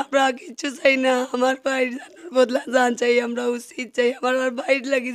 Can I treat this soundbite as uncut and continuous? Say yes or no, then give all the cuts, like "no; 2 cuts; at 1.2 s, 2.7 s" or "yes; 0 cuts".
yes; 0 cuts